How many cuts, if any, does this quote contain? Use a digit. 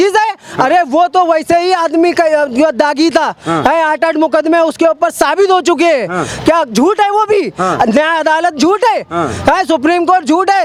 0